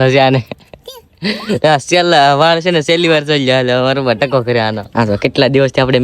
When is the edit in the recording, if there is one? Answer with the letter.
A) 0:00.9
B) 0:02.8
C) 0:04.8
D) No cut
C